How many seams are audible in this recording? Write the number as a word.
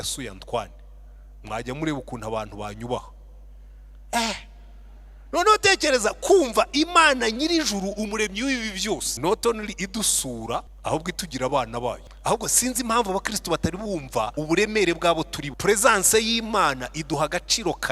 five